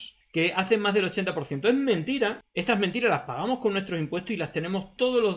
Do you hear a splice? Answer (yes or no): no